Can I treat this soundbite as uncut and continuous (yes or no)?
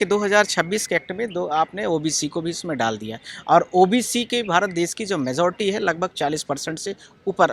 yes